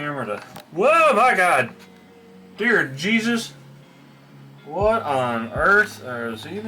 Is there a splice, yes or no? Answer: no